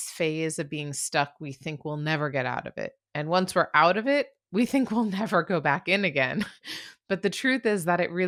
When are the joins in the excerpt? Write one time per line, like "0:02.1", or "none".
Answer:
none